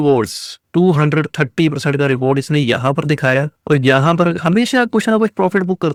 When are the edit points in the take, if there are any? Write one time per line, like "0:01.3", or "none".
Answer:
none